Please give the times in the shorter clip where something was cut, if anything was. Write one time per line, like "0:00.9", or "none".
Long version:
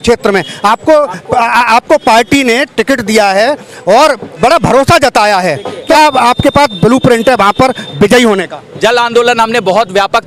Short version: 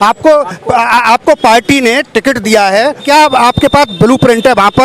0:03.0